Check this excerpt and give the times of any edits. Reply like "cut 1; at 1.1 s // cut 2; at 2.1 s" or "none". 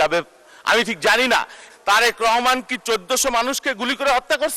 cut 1; at 1.6 s